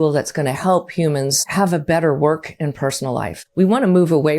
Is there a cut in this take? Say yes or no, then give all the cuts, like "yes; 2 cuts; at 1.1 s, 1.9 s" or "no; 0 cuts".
yes; 2 cuts; at 1.5 s, 3.4 s